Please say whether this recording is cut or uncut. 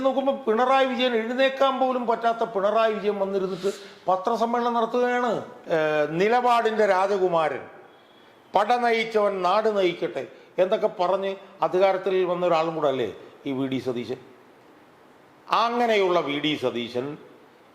cut